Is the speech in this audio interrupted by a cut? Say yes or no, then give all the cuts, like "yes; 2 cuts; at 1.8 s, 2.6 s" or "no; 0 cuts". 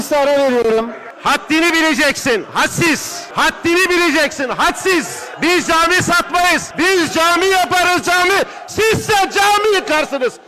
yes; 4 cuts; at 1.0 s, 3.2 s, 5.2 s, 6.7 s